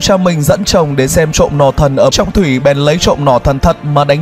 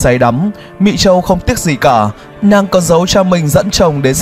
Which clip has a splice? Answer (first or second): first